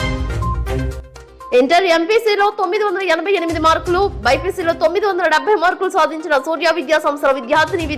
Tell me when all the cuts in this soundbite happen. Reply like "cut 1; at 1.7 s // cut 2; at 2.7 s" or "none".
none